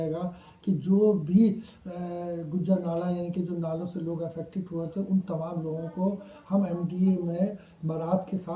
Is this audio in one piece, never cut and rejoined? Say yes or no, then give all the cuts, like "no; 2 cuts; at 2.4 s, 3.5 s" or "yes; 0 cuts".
yes; 0 cuts